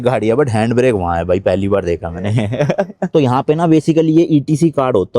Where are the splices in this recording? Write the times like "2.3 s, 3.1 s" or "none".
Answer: 3.1 s